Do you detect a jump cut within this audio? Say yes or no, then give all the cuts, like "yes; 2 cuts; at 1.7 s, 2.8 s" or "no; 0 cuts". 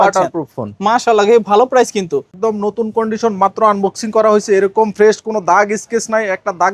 yes; 1 cut; at 2.3 s